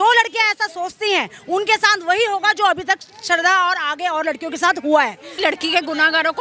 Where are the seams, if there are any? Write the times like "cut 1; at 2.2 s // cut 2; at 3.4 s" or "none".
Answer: cut 1; at 5.4 s